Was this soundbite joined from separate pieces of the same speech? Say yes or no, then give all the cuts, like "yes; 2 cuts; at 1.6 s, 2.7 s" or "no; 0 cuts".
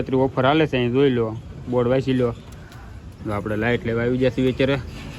no; 0 cuts